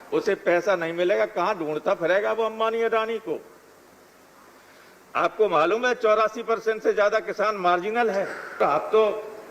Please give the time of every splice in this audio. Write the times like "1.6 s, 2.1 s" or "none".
8.6 s